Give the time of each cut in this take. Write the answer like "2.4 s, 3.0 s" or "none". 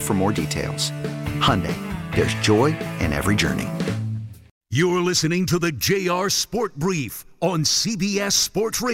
4.4 s